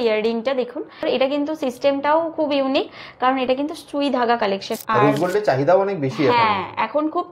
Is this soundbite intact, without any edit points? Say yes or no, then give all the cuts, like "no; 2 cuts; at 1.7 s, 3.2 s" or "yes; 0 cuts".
no; 2 cuts; at 1.0 s, 4.7 s